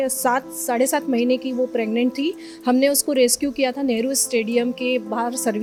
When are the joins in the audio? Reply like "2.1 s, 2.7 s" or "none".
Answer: none

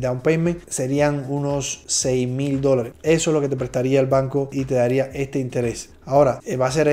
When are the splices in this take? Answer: none

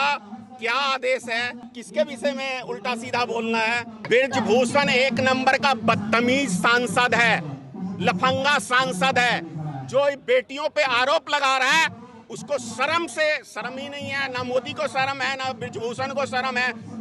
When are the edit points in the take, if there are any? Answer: 1.7 s, 4.0 s

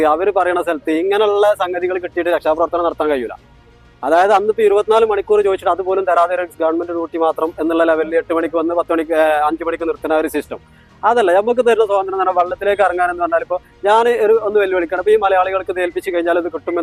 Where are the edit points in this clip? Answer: none

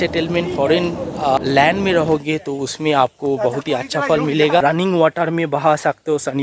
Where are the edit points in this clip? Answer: 1.4 s, 4.6 s

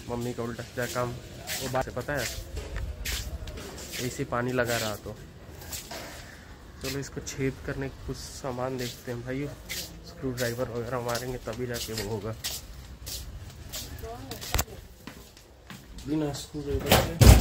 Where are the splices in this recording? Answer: 1.8 s

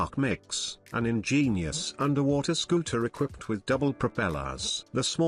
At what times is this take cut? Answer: none

